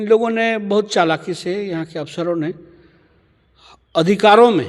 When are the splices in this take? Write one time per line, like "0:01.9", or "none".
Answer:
none